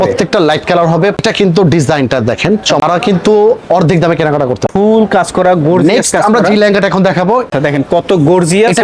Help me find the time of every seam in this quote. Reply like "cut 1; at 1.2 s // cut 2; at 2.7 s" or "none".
cut 1; at 1.2 s // cut 2; at 2.8 s // cut 3; at 4.7 s // cut 4; at 7.5 s